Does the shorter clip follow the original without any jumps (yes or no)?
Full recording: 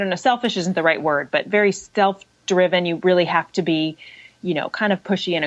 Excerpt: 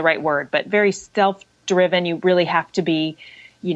yes